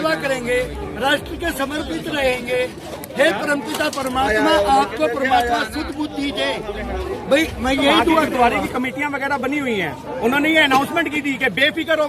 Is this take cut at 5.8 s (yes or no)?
no